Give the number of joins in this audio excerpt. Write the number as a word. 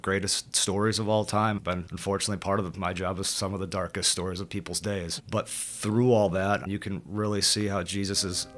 one